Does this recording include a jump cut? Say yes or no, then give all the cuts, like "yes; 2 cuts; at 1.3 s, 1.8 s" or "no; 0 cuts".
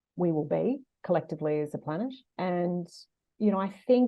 yes; 1 cut; at 2.2 s